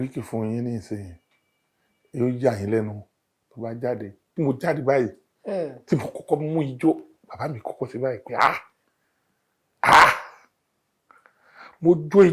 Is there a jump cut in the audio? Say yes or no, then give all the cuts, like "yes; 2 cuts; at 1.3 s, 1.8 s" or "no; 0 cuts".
yes; 1 cut; at 4.2 s